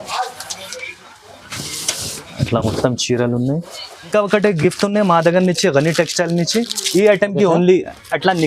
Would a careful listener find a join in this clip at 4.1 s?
yes; 1 cut; at 4.1 s

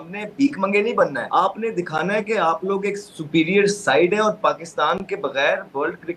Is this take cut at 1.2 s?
yes; 1 cut; at 1.2 s

